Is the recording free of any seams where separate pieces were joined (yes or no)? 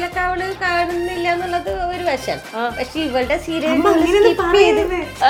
yes